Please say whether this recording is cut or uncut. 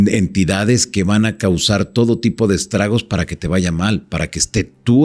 uncut